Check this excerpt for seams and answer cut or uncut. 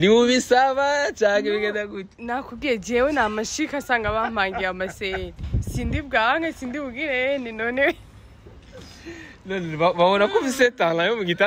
uncut